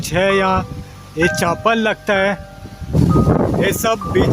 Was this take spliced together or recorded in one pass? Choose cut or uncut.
cut